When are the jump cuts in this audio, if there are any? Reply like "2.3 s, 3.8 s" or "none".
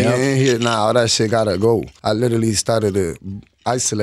1.9 s